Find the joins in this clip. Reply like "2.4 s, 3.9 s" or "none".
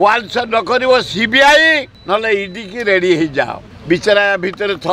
1.9 s, 3.7 s